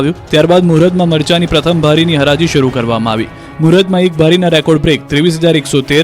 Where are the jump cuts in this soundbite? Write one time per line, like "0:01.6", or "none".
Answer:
0:02.6